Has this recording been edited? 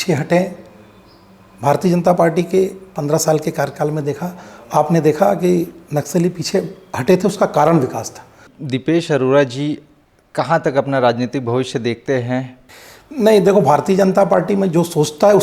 yes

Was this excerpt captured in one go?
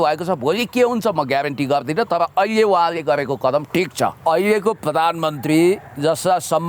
no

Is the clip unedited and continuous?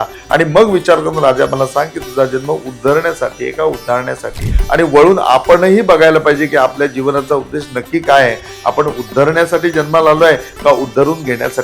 no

